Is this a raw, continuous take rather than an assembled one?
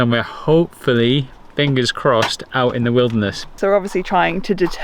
no; 1 cut; at 3.6 s

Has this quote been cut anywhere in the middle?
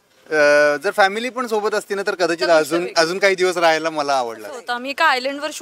yes; 1 cut; at 4.7 s

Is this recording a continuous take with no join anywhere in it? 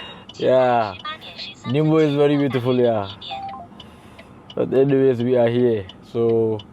yes; 0 cuts

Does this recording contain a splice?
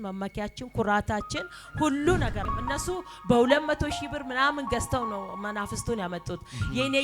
yes; 1 cut; at 2.4 s

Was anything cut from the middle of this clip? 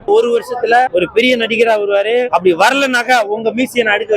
yes; 2 cuts; at 0.9 s, 2.3 s

